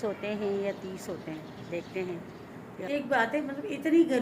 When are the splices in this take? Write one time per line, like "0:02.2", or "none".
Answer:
0:02.9